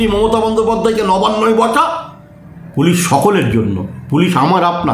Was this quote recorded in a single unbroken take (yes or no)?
yes